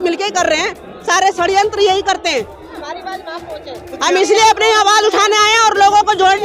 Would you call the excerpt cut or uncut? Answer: cut